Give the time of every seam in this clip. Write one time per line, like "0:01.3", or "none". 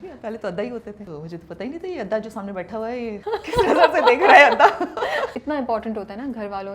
0:01.0
0:03.2
0:05.3